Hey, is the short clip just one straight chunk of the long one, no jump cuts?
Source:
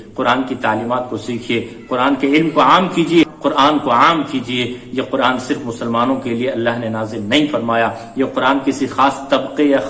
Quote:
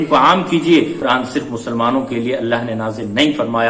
no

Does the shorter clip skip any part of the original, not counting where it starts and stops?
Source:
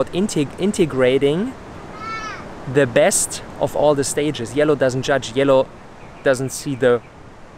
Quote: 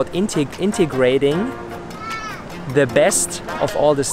no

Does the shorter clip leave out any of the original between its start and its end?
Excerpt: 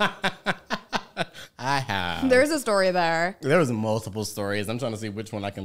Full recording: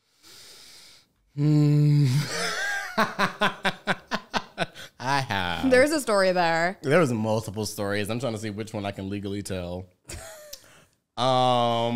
no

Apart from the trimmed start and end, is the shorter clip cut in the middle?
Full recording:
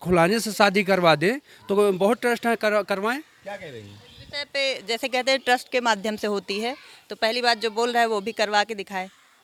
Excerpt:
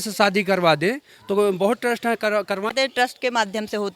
yes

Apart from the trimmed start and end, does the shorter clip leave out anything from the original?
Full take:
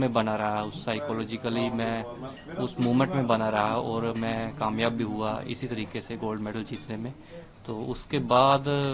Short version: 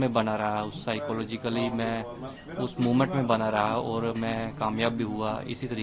no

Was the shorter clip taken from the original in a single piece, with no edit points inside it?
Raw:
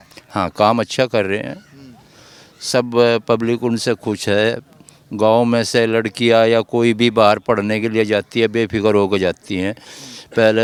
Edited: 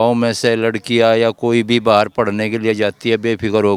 yes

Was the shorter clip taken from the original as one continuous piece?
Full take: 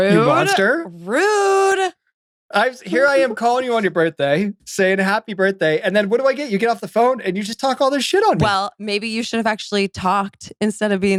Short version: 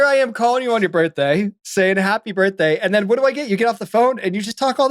yes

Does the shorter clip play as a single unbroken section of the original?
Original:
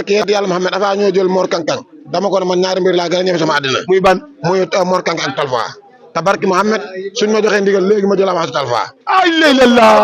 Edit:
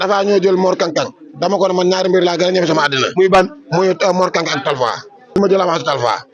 no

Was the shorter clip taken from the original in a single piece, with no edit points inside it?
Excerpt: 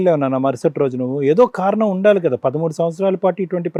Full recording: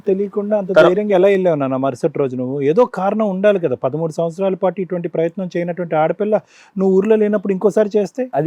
yes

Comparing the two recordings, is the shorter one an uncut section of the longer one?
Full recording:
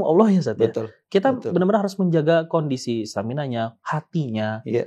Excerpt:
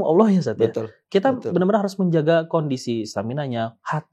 yes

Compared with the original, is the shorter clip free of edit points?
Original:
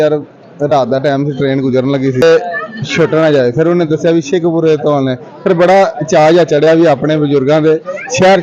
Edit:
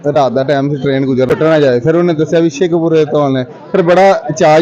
no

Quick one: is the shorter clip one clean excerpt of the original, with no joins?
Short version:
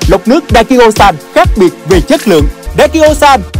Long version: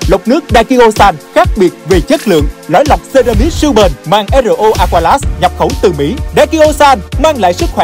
no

